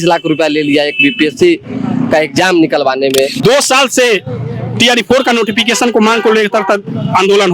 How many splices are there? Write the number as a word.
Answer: one